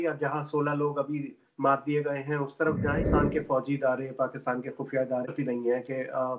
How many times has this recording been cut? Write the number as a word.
two